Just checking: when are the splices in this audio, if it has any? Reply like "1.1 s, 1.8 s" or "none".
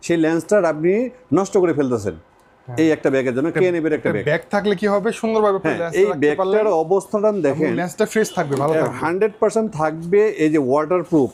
none